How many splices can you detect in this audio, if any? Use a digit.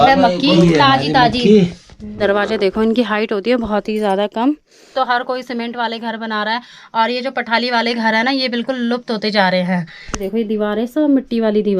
3